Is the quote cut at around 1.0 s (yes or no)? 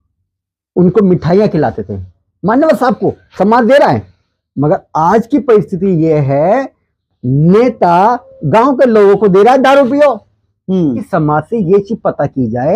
no